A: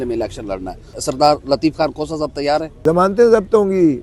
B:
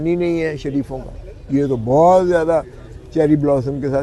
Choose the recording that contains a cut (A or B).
A